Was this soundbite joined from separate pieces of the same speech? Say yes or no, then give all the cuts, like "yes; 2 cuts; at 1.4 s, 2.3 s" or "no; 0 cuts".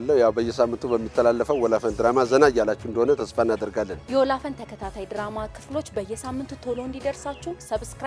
no; 0 cuts